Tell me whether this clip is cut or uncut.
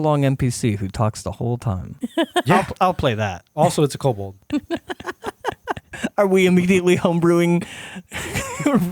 cut